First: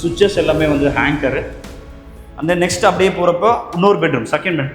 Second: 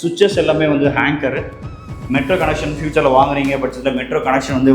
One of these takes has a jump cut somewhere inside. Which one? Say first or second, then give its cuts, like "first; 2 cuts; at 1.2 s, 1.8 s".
second; 1 cut; at 1.9 s